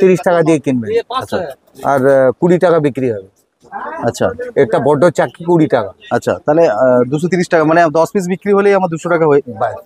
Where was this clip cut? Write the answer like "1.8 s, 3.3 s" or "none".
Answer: none